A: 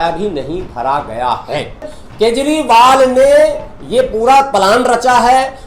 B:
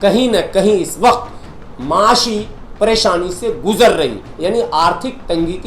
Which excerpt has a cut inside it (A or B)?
A